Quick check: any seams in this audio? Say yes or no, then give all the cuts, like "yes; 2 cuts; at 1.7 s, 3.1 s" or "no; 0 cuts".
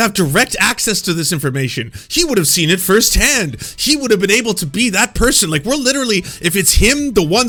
no; 0 cuts